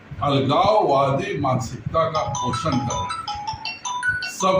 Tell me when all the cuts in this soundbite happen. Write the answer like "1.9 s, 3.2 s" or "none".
none

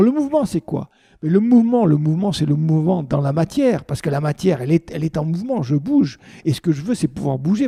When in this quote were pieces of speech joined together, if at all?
none

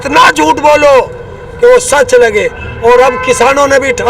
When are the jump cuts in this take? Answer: none

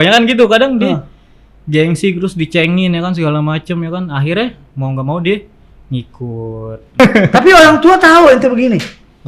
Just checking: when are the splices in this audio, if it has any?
7.0 s

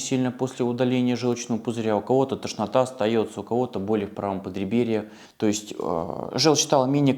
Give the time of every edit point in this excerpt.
5.2 s

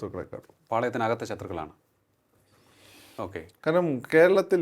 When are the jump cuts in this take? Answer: none

